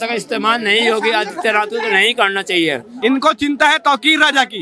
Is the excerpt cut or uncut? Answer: cut